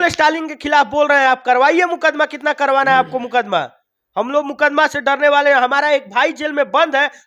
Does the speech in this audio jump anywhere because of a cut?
no; 0 cuts

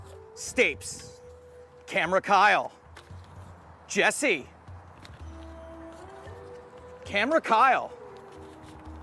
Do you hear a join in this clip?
no; 0 cuts

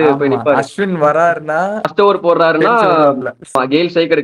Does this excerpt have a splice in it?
yes; 2 cuts; at 1.9 s, 3.5 s

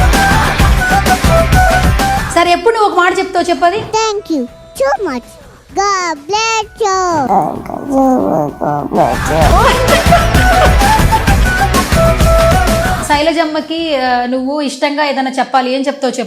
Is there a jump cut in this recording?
yes; 2 cuts; at 2.2 s, 13.0 s

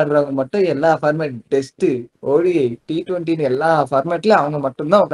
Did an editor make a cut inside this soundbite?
no; 0 cuts

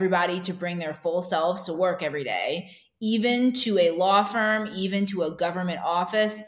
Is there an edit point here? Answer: no; 0 cuts

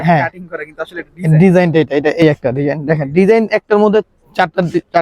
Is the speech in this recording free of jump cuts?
no; 1 cut; at 2.2 s

